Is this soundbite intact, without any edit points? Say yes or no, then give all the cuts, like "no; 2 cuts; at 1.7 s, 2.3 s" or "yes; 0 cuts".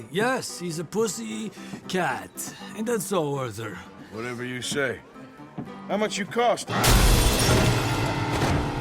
no; 1 cut; at 6.6 s